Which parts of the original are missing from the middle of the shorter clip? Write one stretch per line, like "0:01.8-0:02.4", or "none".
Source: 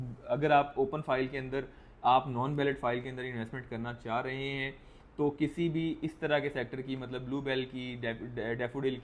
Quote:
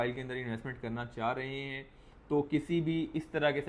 none